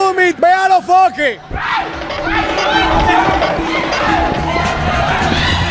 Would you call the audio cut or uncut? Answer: uncut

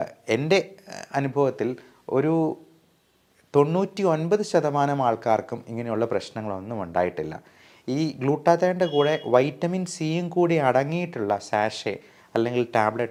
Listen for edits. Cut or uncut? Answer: uncut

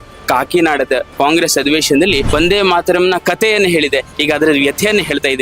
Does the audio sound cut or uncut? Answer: cut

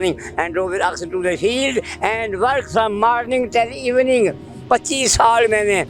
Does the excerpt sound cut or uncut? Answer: uncut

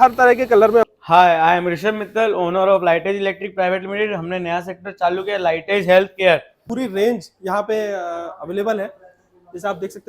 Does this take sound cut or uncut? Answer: cut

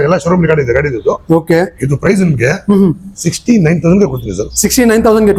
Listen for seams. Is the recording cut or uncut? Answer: uncut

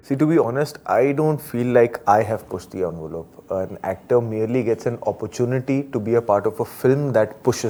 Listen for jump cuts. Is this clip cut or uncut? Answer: uncut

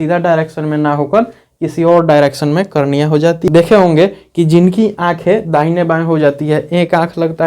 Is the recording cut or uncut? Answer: cut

